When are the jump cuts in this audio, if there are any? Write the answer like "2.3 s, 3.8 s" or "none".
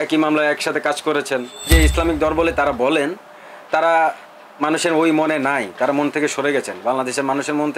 1.7 s